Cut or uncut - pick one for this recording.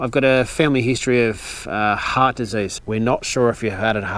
cut